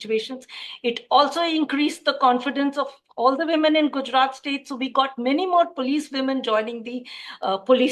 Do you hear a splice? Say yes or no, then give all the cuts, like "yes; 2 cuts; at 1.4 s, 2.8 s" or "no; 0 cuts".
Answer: no; 0 cuts